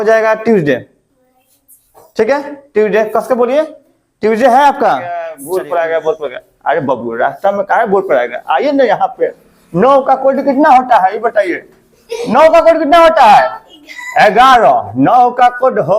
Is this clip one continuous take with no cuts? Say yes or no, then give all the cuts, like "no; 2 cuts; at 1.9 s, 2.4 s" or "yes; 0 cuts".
no; 1 cut; at 5.4 s